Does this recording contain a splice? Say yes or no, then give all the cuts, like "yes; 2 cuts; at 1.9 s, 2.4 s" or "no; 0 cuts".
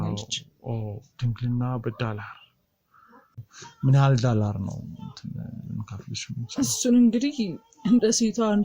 yes; 1 cut; at 3.3 s